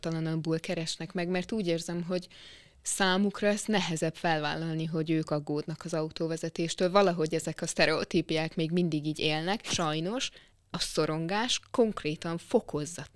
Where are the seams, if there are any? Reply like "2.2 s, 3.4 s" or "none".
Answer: 9.7 s